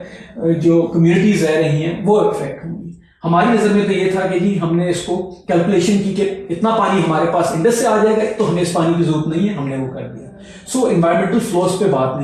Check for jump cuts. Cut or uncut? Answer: uncut